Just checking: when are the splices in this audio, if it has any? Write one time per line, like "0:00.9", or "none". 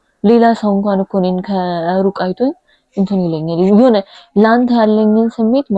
none